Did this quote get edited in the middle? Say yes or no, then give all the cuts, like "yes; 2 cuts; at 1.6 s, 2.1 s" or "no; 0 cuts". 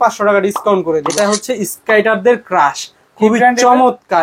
yes; 1 cut; at 1.1 s